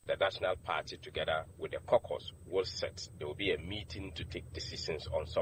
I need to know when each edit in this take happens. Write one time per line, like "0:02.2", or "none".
none

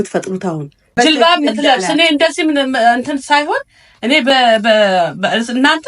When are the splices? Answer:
0:00.9

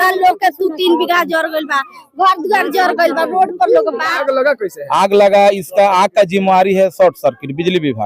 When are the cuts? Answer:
0:04.1

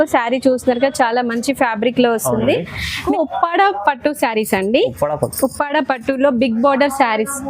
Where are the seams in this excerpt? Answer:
0:03.1

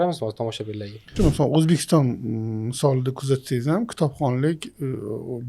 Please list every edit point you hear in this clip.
0:01.1

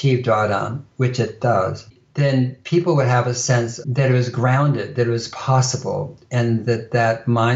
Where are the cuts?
0:01.9
0:03.8

